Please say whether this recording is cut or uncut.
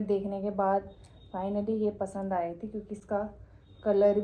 uncut